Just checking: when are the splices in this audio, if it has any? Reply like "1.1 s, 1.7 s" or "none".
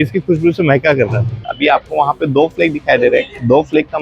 1.4 s

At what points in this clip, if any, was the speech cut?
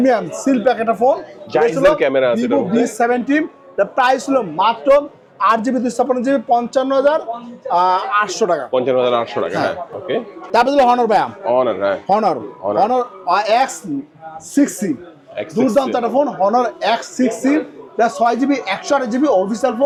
none

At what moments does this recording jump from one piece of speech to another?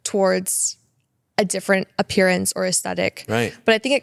none

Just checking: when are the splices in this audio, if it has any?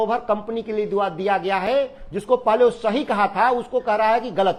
none

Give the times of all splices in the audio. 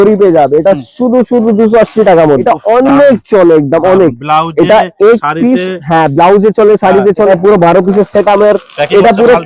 2.4 s, 7.3 s

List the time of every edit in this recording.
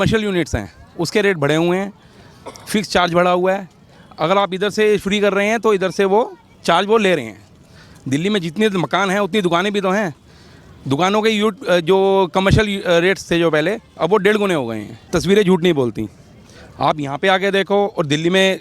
14.9 s

